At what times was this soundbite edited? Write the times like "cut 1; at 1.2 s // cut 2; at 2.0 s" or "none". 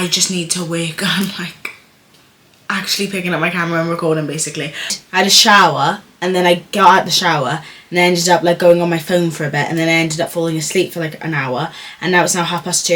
cut 1; at 4.9 s